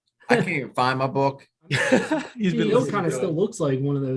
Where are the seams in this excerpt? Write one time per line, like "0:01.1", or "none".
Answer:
0:02.7